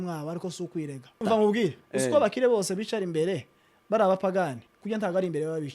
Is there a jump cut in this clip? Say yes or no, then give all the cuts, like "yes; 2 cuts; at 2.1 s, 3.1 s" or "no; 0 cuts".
yes; 1 cut; at 1.2 s